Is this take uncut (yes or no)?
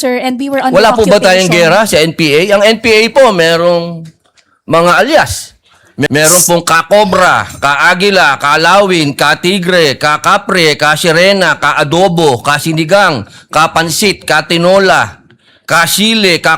no